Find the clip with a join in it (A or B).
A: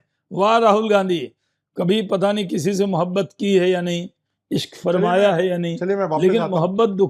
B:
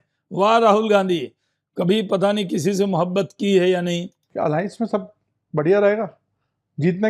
B